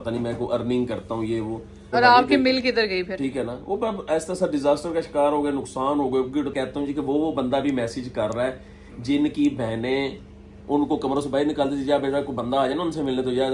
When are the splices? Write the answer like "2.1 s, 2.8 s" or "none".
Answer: 1.9 s, 6.5 s